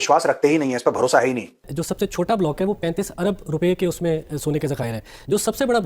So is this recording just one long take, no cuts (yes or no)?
no